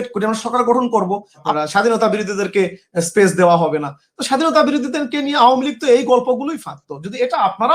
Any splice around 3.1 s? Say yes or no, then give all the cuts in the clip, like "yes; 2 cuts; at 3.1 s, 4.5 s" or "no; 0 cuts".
no; 1 cut; at 1.5 s